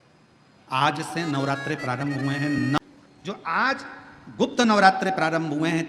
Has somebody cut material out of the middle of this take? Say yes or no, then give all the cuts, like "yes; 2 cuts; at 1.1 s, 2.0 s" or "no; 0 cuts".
yes; 1 cut; at 2.8 s